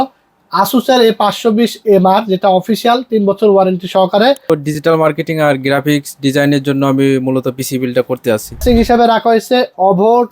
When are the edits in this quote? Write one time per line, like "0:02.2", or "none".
0:04.5
0:08.6